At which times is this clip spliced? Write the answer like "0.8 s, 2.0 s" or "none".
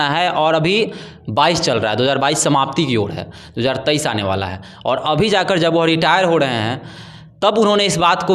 none